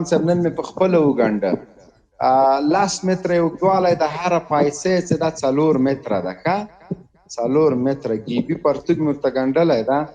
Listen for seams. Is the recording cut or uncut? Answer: uncut